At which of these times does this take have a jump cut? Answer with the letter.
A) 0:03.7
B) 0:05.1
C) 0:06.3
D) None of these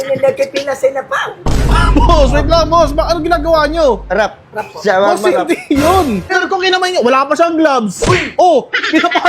C